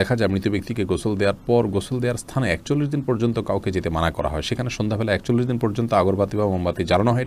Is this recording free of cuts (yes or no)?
yes